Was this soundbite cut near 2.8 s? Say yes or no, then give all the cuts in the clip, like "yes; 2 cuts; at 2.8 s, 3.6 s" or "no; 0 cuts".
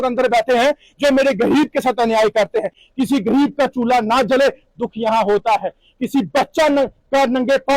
yes; 1 cut; at 2.8 s